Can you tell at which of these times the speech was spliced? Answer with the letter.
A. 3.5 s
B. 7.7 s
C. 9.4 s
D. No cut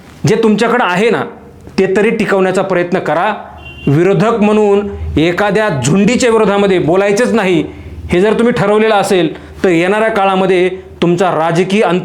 D